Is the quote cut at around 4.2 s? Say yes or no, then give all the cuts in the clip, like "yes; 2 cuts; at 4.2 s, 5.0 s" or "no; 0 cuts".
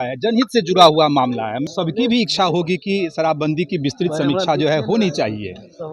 no; 1 cut; at 1.7 s